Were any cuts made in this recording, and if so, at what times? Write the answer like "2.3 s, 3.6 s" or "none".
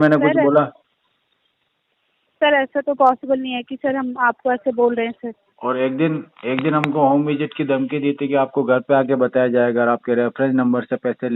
none